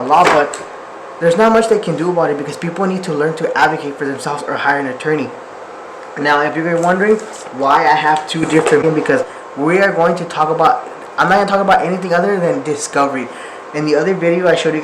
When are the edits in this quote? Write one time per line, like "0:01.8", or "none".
0:08.8